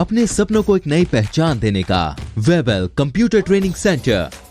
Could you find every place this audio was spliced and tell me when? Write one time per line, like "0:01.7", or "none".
0:02.2